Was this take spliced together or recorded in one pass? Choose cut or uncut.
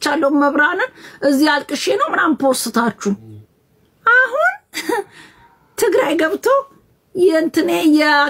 uncut